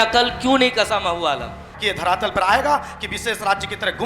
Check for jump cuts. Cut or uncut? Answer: cut